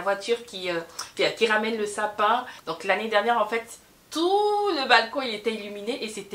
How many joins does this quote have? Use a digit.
1